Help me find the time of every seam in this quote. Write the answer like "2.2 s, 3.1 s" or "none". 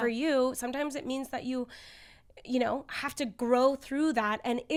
none